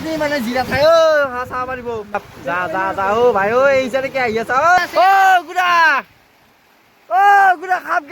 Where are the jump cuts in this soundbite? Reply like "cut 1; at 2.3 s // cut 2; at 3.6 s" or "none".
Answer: cut 1; at 2.3 s // cut 2; at 4.8 s

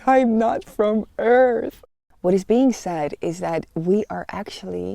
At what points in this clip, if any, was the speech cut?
cut 1; at 1.7 s

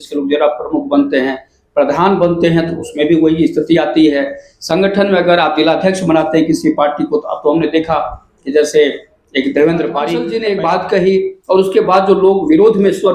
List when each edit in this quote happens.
cut 1; at 10.3 s

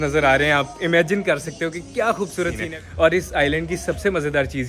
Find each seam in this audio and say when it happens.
cut 1; at 2.6 s

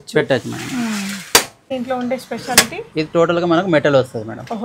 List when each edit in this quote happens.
cut 1; at 1.7 s

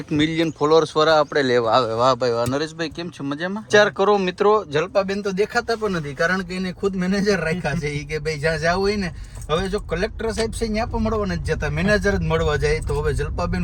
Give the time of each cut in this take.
cut 1; at 3.7 s

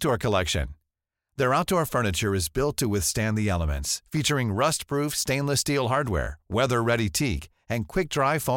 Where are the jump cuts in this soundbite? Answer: none

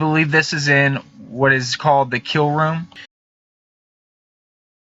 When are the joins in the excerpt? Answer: none

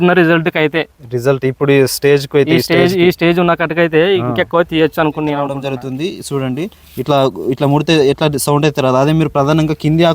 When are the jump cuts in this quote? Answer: cut 1; at 5.7 s

